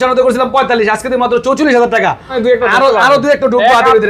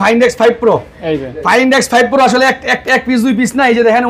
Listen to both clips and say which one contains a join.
first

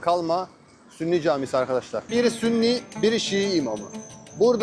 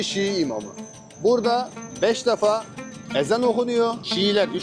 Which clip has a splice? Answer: first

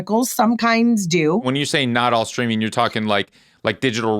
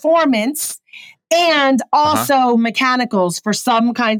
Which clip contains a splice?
first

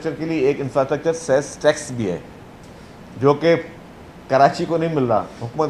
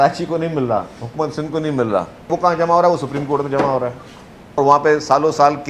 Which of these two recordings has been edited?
second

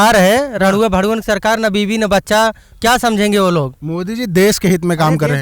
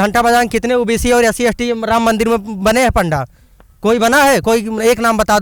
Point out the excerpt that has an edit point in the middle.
first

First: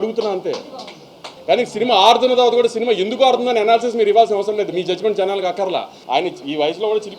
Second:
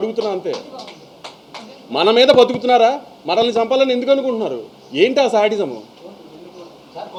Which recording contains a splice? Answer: first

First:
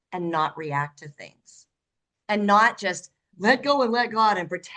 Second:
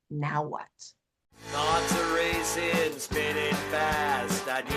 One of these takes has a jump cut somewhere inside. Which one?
second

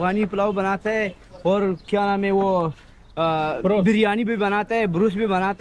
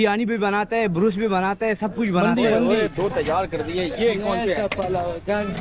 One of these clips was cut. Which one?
second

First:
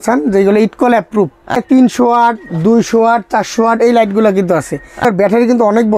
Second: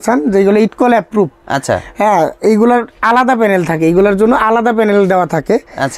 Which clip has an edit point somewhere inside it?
first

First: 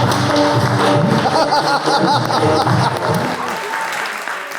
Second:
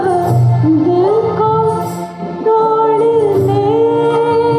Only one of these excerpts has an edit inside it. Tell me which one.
first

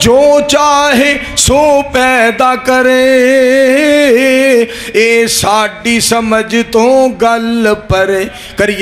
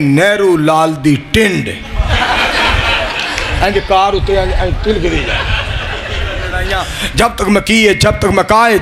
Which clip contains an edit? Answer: second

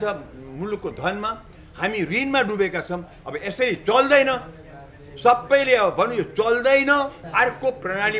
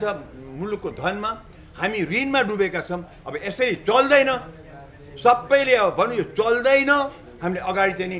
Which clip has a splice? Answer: first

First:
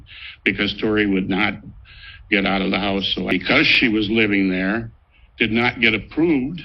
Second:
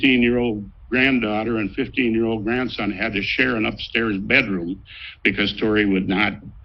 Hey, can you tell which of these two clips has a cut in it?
first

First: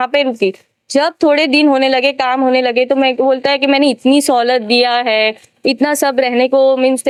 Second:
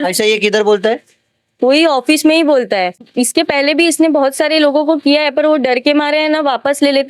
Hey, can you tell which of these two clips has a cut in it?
second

